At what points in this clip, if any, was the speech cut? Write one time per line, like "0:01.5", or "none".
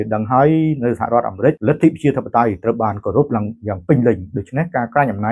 0:01.6